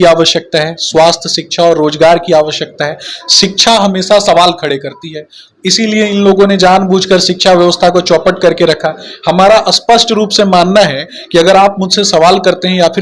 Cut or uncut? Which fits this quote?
uncut